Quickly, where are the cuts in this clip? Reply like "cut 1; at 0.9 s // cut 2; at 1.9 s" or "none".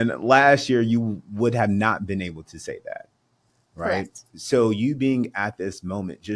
none